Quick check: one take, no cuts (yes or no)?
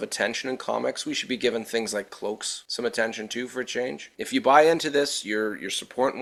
yes